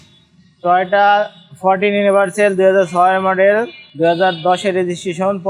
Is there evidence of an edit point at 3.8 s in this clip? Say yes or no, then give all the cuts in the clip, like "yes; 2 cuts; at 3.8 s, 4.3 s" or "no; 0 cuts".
yes; 1 cut; at 3.8 s